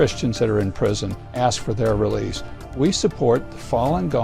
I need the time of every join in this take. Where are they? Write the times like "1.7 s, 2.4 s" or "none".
1.3 s, 2.7 s